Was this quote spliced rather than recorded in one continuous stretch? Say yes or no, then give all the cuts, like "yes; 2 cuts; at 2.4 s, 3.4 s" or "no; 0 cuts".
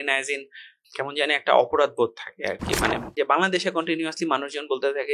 yes; 1 cut; at 3.1 s